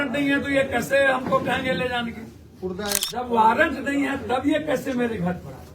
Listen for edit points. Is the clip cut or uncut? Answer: cut